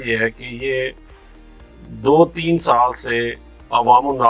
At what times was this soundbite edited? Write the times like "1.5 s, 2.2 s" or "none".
none